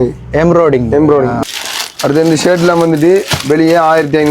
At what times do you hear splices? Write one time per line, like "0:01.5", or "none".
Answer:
0:01.4